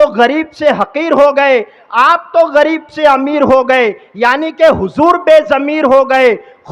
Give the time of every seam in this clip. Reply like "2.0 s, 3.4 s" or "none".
none